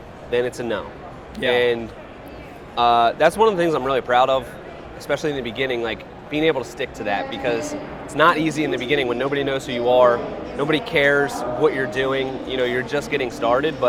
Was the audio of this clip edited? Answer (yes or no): no